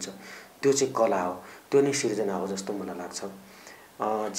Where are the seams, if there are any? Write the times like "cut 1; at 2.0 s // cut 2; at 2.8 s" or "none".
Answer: none